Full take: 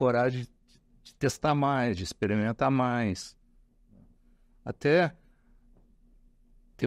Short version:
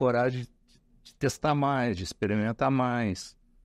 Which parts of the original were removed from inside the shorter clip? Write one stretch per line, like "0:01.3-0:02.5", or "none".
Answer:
none